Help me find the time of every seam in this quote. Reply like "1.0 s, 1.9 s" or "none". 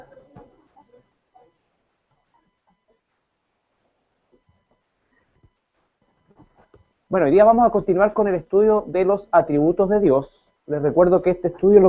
8.4 s